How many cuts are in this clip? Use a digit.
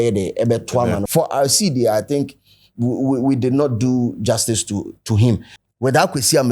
2